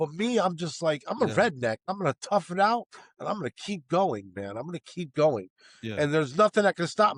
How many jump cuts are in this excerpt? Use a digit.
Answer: 1